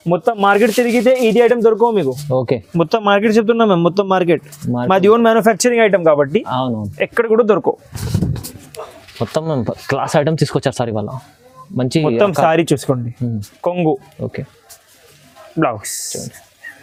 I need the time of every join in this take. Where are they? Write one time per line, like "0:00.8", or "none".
none